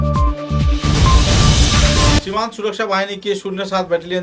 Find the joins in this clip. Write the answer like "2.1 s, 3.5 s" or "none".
none